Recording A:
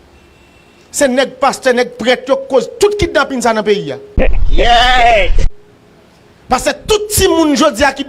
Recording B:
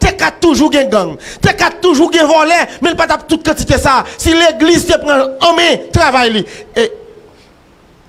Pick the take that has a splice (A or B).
A